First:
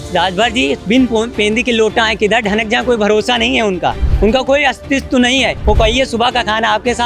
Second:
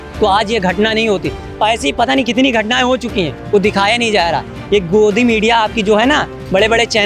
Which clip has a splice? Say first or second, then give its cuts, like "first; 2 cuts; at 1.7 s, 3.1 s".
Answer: first; 2 cuts; at 4.1 s, 5.6 s